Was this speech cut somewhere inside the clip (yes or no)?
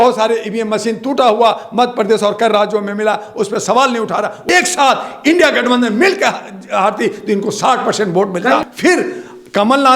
yes